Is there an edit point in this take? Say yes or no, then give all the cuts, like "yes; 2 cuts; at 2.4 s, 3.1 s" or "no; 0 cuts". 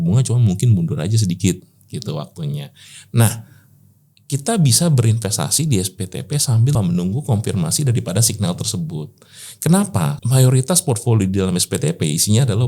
yes; 2 cuts; at 6.8 s, 10.2 s